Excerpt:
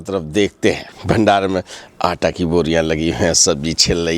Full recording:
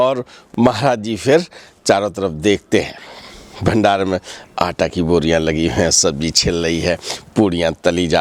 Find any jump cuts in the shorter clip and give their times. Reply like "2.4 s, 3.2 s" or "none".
0.9 s